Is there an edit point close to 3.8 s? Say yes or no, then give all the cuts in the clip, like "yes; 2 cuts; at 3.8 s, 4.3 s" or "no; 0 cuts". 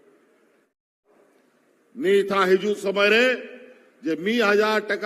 no; 1 cut; at 1.2 s